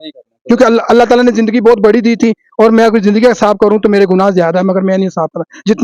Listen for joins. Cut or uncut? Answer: uncut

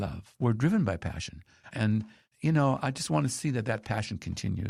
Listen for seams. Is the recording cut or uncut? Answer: uncut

